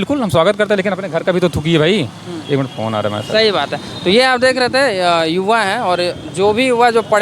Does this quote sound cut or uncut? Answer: uncut